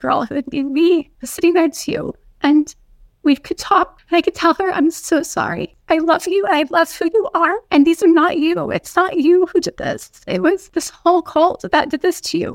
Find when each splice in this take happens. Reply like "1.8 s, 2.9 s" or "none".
1.2 s, 4.0 s, 5.7 s, 7.6 s, 10.7 s